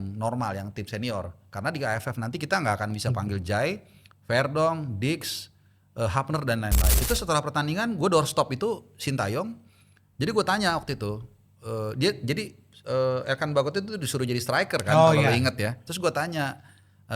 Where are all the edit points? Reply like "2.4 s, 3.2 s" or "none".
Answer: 6.9 s